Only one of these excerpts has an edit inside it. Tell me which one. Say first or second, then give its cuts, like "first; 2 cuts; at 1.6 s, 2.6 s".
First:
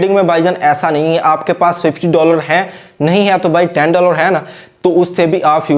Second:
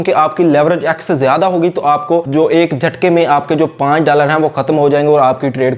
second; 1 cut; at 2.3 s